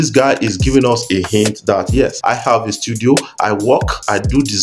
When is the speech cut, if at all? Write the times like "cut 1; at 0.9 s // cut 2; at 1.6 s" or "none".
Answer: cut 1; at 2.2 s